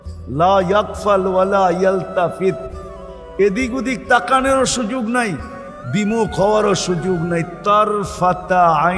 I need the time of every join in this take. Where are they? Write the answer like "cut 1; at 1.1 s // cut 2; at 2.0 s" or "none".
none